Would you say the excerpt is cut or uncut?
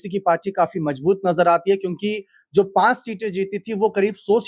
uncut